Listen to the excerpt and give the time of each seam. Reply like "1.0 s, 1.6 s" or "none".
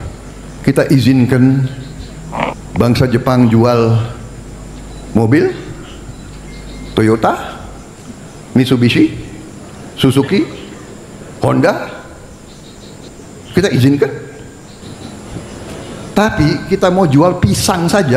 13.1 s, 14.8 s